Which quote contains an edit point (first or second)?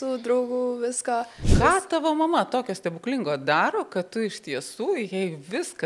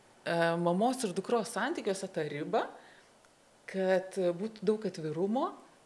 first